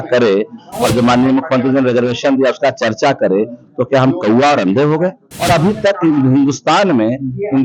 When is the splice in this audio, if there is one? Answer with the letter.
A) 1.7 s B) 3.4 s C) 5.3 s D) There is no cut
C